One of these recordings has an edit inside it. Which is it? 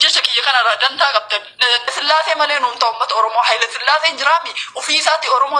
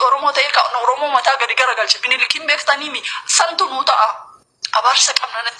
first; 1 cut; at 1.9 s

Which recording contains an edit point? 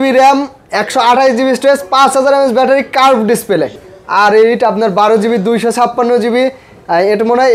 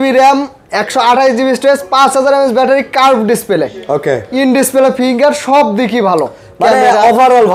first; 1 cut; at 3.8 s

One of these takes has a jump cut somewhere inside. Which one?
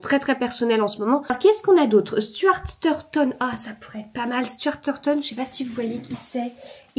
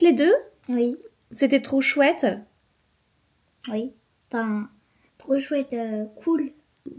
first; 1 cut; at 1.4 s

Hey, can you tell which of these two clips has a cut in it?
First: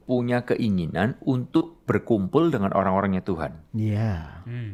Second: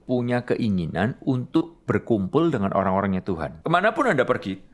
second; 1 cut; at 3.5 s

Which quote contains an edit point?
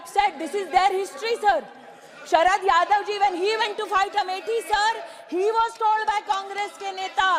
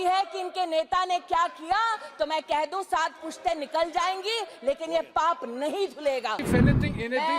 second; 1 cut; at 6.4 s

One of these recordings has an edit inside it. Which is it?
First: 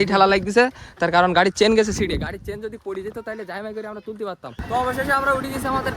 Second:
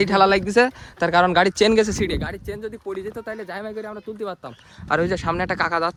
first; 1 cut; at 4.5 s

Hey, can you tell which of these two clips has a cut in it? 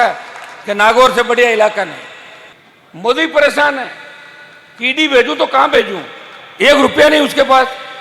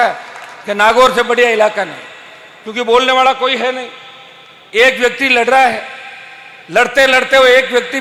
first; 1 cut; at 2.6 s

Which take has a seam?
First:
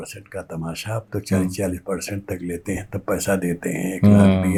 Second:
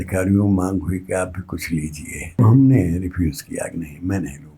second; 1 cut; at 2.4 s

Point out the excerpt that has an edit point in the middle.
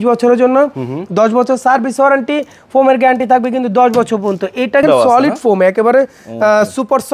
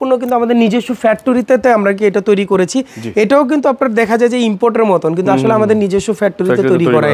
first; 1 cut; at 4.8 s

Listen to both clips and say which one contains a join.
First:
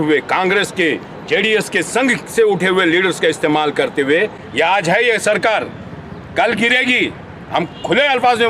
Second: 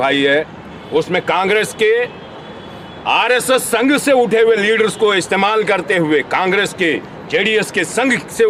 first; 1 cut; at 4.4 s

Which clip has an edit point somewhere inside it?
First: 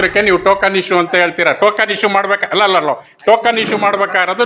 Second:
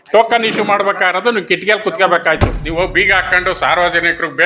second; 1 cut; at 2.5 s

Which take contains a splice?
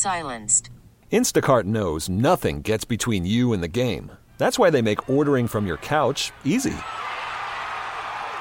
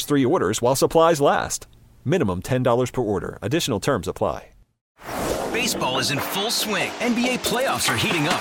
second; 1 cut; at 4.8 s

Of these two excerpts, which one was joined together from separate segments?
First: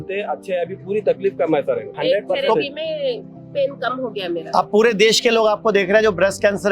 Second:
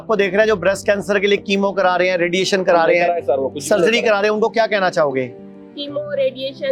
first; 1 cut; at 1.9 s

